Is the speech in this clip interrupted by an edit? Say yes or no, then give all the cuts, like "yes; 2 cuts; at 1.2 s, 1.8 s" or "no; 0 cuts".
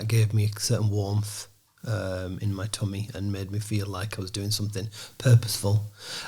no; 0 cuts